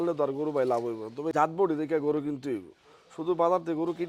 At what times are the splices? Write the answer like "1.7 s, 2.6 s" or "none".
1.3 s

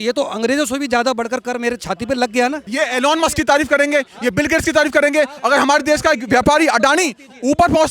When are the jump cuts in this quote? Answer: 2.6 s

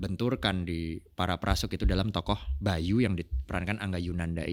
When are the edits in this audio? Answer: none

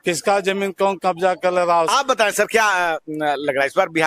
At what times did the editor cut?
1.9 s

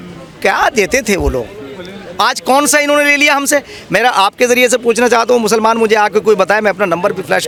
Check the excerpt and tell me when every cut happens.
none

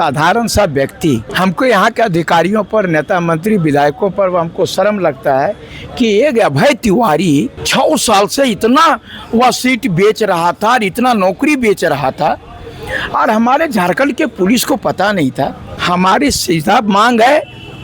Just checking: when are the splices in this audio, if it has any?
1.3 s, 7.6 s, 15.7 s

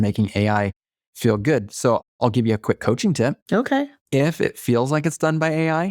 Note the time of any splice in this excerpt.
3.7 s

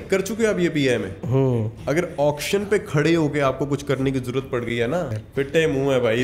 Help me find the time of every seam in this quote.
5.2 s

